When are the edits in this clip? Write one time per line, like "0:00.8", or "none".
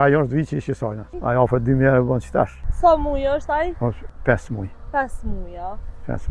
0:01.1
0:02.6
0:04.1